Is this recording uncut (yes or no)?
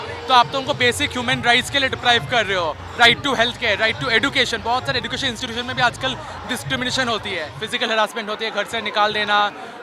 no